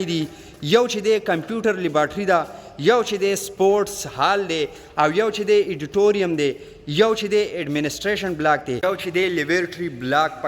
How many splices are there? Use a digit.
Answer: 1